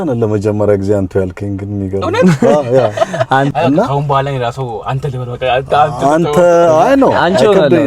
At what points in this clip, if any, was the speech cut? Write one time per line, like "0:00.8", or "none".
0:03.5